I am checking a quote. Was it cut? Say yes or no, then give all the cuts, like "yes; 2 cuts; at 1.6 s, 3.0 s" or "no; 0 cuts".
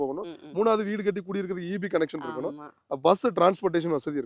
no; 0 cuts